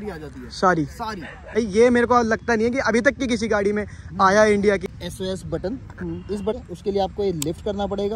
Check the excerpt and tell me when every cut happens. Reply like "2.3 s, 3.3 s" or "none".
1.5 s, 4.8 s, 6.5 s